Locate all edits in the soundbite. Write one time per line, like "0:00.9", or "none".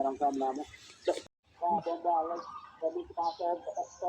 0:01.2